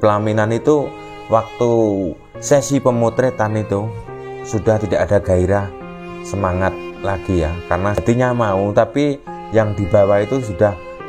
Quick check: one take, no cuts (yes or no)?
no